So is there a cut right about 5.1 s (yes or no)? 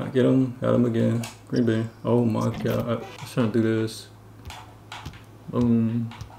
no